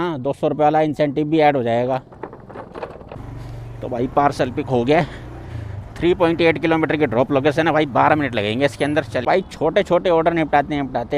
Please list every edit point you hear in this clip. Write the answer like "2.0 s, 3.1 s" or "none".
3.2 s, 9.2 s